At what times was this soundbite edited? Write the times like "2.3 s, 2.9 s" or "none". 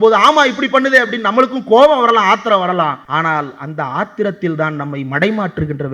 3.0 s

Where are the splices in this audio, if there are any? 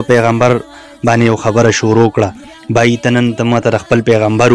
none

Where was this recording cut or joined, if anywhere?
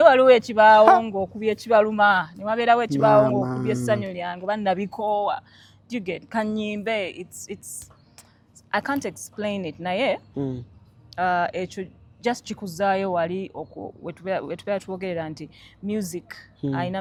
none

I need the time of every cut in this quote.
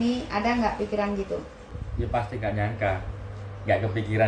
1.8 s

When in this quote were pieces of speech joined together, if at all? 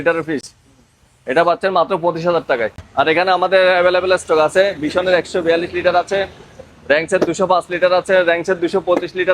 2.8 s

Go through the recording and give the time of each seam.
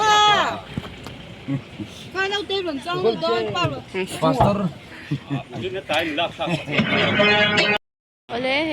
7.8 s

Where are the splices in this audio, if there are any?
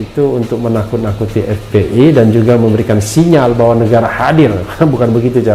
none

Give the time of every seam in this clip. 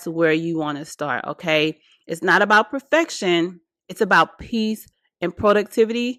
none

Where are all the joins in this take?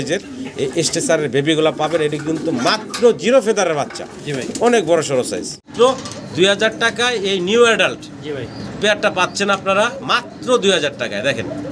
5.7 s

